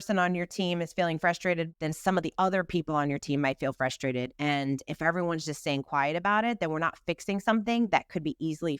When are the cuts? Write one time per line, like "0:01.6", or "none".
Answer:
0:01.7
0:04.3